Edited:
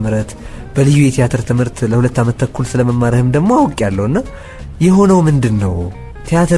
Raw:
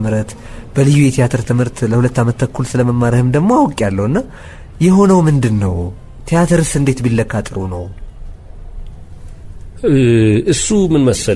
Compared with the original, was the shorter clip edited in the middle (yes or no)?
no